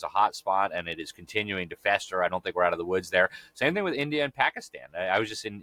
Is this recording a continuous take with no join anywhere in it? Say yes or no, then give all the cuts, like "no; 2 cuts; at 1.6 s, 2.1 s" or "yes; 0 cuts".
yes; 0 cuts